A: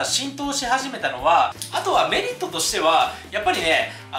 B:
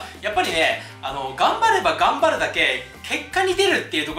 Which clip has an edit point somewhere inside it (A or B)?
A